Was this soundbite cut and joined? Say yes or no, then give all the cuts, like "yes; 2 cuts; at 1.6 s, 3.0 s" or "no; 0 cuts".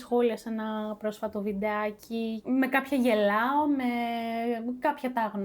no; 0 cuts